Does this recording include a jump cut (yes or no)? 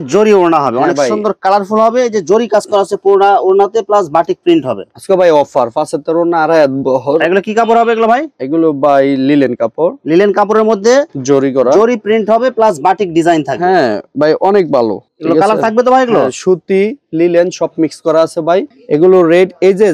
no